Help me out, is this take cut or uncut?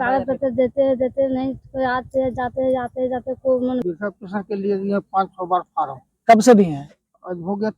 cut